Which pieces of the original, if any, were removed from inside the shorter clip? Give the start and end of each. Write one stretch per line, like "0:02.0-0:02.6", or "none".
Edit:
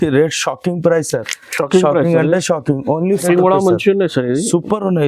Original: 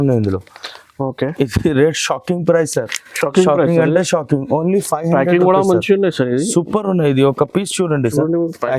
0:04.9-0:05.3